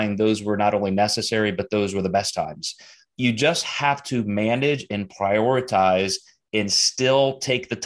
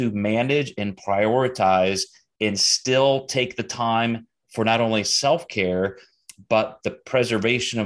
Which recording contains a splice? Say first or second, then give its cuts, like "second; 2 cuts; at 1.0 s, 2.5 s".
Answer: first; 1 cut; at 3.0 s